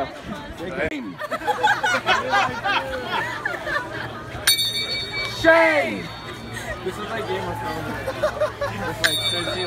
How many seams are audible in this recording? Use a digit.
1